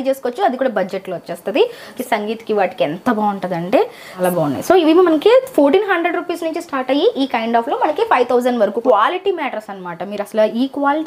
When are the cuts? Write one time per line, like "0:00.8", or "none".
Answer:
0:01.9
0:04.2
0:08.8